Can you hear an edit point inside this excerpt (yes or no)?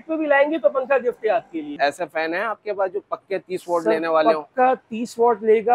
yes